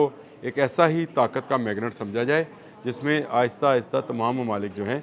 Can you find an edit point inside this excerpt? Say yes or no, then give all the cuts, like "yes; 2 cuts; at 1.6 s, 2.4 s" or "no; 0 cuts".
no; 0 cuts